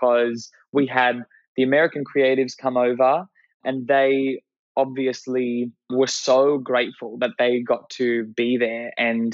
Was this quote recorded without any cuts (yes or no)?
no